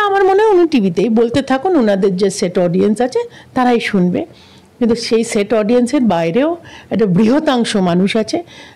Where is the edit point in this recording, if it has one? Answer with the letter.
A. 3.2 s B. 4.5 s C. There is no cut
C